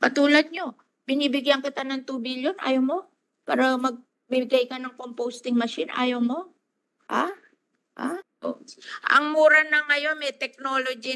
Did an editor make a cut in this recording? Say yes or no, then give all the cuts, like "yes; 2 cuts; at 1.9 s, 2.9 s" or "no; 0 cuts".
yes; 1 cut; at 8.3 s